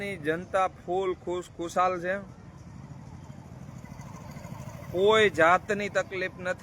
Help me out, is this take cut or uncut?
uncut